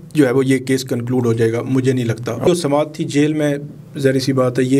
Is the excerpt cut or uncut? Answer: cut